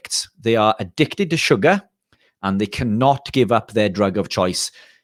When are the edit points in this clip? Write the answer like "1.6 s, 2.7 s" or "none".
none